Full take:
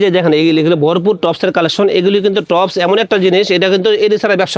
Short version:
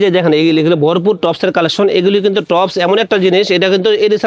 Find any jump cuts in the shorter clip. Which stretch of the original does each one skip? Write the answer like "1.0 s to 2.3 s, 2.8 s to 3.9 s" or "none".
none